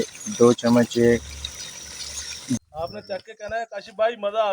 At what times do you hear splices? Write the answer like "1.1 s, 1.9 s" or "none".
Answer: 2.6 s